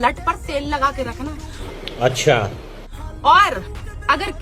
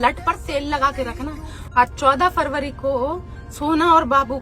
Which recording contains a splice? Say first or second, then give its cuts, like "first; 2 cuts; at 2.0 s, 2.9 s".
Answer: second; 1 cut; at 1.7 s